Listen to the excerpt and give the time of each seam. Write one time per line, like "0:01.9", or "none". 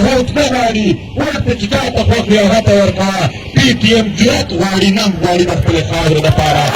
none